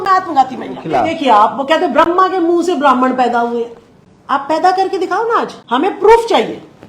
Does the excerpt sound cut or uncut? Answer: cut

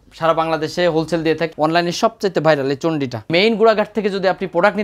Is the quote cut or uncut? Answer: cut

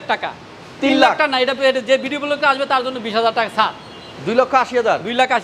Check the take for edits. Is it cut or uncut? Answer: uncut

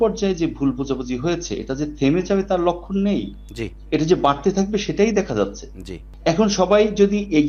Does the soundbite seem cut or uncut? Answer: uncut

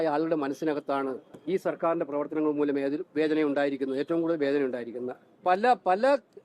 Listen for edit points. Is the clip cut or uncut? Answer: cut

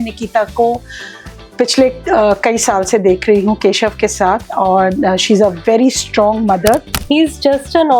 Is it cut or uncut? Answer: cut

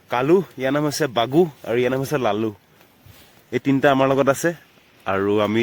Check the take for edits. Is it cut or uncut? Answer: uncut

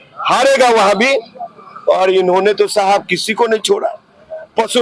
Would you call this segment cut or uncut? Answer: uncut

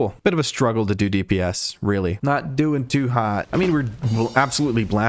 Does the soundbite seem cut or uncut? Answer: cut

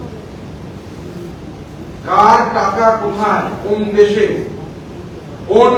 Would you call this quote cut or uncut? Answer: uncut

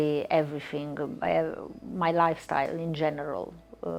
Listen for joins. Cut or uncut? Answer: uncut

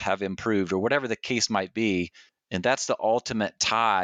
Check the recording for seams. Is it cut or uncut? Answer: uncut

